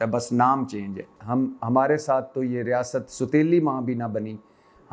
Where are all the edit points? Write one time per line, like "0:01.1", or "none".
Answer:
0:01.1